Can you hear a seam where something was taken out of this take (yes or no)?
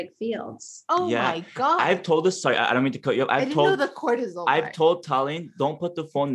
no